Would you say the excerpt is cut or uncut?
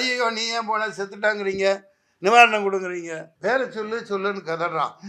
cut